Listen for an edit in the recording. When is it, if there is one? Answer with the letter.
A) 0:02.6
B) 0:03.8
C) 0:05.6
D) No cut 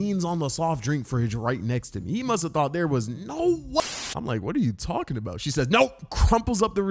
B